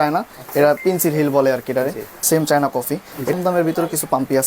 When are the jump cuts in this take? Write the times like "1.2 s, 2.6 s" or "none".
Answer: 2.1 s, 3.3 s